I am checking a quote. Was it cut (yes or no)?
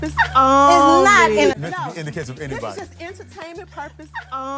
yes